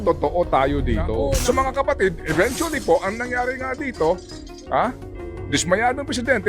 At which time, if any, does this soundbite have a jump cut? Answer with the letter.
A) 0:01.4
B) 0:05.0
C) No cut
A